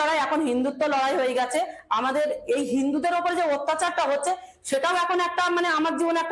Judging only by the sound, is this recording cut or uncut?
uncut